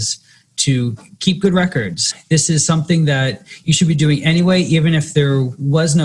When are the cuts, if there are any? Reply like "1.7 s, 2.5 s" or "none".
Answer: 2.1 s